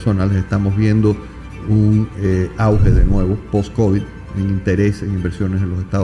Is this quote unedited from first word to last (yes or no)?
yes